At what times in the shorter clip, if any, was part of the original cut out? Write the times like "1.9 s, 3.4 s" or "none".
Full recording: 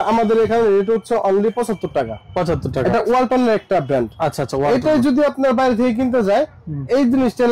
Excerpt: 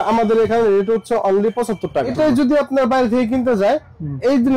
2.1 s